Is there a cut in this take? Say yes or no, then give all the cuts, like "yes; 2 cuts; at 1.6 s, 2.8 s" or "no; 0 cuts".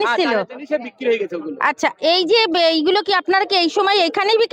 no; 0 cuts